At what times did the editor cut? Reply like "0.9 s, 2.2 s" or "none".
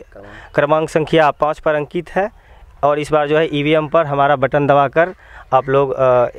none